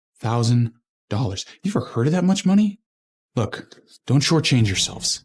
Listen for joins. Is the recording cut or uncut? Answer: uncut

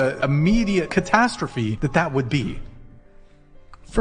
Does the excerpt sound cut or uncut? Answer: uncut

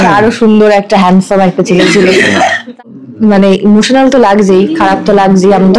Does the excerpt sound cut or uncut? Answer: cut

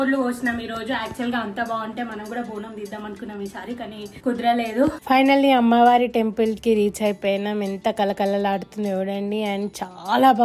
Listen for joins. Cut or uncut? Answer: cut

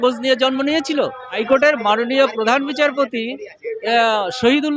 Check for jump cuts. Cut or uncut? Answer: cut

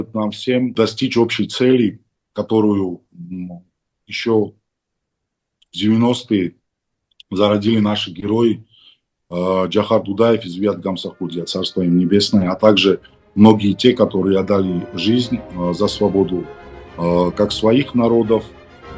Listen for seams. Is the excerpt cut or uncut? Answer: uncut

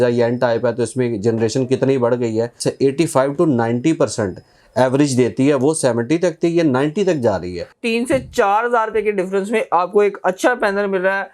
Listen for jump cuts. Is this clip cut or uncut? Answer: cut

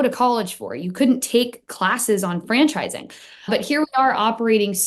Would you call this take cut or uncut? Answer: cut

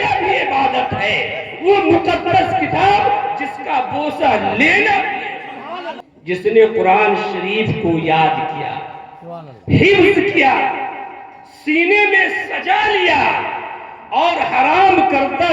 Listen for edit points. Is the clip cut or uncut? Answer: cut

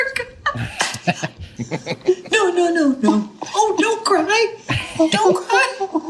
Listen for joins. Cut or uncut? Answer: uncut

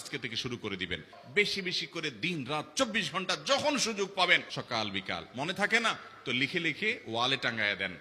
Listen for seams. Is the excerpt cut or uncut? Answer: cut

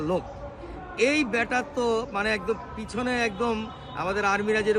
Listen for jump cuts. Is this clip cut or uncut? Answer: uncut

